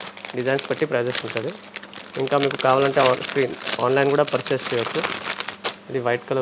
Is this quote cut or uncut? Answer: uncut